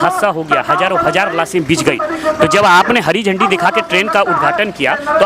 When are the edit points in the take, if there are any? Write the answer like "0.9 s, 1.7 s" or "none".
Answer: none